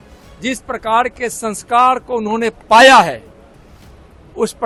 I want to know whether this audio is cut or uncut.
uncut